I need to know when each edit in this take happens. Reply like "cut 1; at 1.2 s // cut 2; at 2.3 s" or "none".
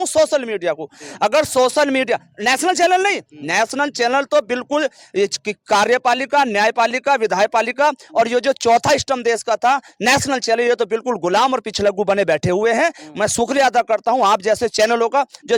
none